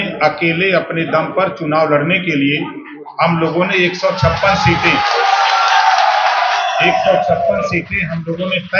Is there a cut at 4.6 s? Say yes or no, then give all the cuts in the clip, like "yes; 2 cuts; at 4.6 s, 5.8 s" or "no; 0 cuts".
no; 0 cuts